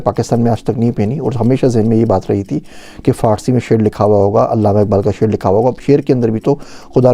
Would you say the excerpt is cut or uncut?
cut